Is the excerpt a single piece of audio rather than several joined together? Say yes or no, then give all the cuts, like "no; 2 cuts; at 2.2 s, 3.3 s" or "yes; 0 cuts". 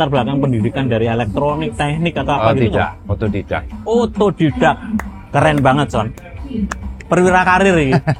yes; 0 cuts